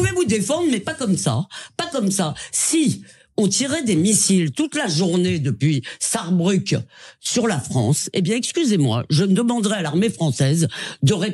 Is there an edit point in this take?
no; 0 cuts

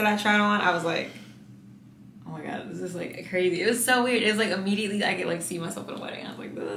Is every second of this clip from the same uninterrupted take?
yes; 0 cuts

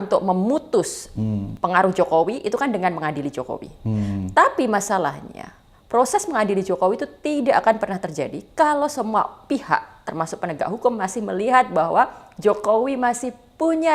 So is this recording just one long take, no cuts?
yes; 0 cuts

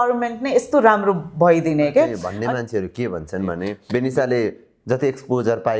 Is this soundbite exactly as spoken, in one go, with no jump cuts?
no; 2 cuts; at 2.3 s, 3.8 s

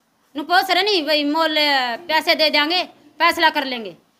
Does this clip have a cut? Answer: no; 0 cuts

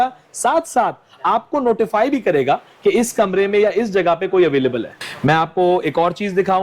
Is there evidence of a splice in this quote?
yes; 1 cut; at 5.0 s

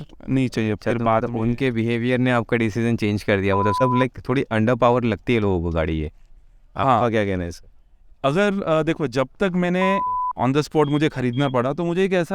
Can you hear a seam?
yes; 2 cuts; at 3.7 s, 10.1 s

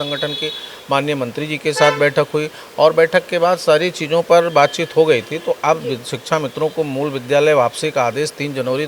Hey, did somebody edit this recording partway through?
no; 0 cuts

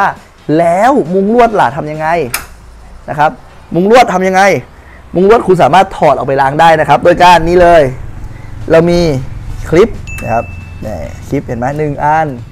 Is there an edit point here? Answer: no; 0 cuts

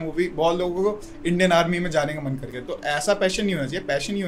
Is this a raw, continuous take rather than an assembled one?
no; 1 cut; at 2.5 s

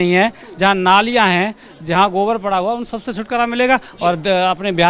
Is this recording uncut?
yes; 0 cuts

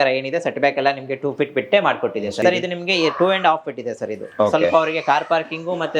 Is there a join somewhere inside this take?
yes; 1 cut; at 2.4 s

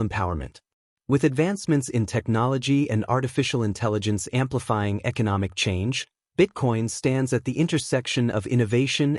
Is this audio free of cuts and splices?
yes; 0 cuts

